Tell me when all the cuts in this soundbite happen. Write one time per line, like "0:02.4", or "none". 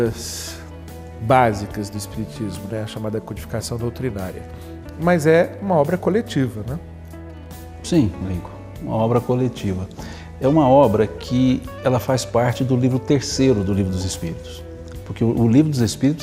none